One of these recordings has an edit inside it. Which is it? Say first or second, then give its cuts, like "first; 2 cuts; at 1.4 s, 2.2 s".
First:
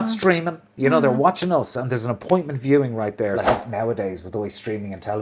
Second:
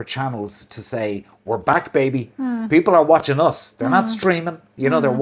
first; 1 cut; at 3.5 s